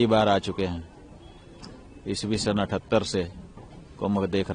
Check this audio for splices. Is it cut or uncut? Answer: uncut